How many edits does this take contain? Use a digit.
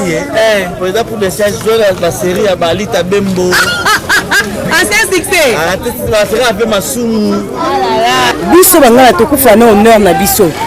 1